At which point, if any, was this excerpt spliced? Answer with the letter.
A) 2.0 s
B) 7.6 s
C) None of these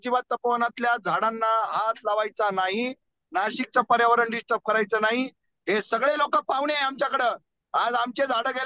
C